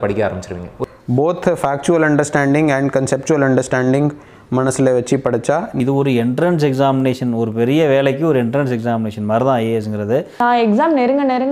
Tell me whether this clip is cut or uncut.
cut